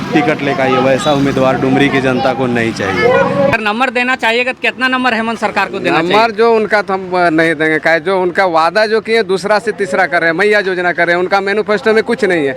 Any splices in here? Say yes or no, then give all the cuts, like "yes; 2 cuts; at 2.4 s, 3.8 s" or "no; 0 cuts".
yes; 1 cut; at 3.5 s